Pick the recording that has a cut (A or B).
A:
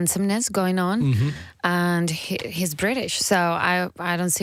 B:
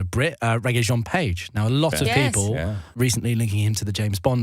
B